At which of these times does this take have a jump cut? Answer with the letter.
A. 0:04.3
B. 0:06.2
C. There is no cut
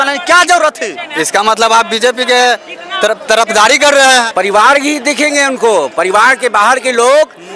A